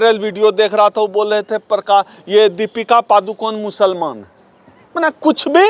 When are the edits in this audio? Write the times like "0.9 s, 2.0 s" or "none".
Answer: none